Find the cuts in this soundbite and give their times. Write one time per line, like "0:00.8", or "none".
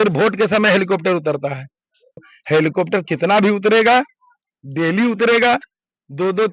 0:02.3